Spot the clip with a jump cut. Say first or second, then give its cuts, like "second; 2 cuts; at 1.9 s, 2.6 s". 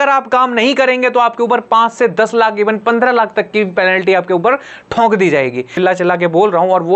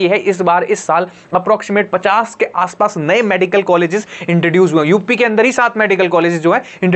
first; 1 cut; at 5.7 s